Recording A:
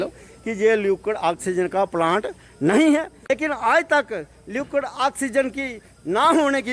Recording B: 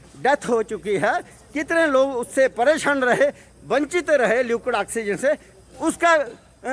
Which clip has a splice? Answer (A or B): A